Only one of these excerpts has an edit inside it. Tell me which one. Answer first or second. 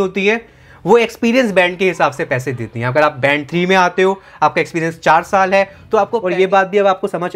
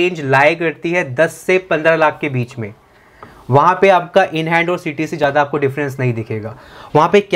first